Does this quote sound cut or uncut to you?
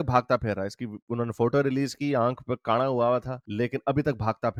uncut